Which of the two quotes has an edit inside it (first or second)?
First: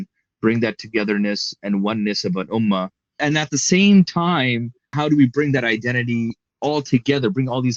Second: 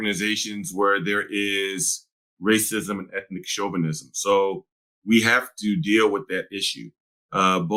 first